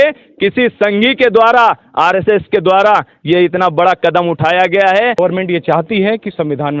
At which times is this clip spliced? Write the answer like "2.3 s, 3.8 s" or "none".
5.2 s